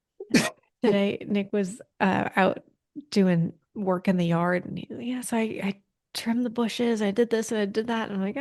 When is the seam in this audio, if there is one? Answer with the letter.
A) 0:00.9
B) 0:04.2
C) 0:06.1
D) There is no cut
A